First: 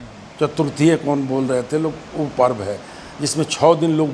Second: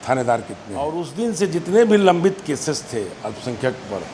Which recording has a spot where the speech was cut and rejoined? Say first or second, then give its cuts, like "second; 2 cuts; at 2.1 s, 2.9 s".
second; 1 cut; at 1.0 s